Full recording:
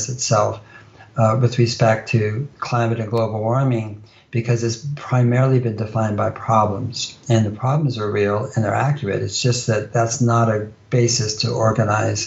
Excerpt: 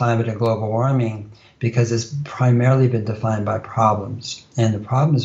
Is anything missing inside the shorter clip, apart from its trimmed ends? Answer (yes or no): no